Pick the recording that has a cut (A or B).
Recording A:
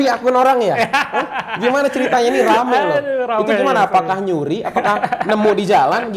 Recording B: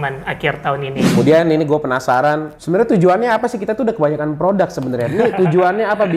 B